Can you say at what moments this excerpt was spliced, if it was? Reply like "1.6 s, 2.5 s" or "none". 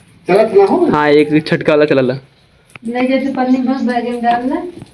none